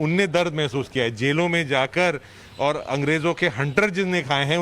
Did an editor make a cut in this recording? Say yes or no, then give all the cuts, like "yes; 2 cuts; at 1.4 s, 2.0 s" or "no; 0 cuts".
yes; 1 cut; at 1.3 s